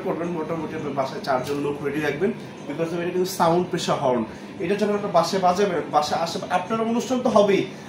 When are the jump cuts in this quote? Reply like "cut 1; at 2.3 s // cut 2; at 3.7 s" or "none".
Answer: none